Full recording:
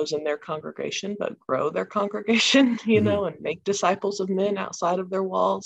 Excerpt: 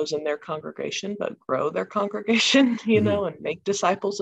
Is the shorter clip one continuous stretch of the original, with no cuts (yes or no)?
yes